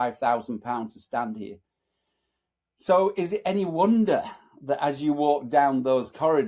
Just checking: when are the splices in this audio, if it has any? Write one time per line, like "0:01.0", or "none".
none